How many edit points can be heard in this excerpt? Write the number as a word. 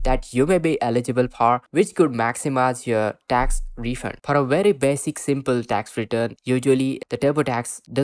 three